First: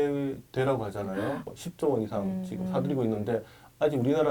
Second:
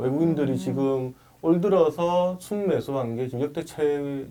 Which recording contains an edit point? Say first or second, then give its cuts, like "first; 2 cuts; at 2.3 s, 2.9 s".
first; 1 cut; at 1.5 s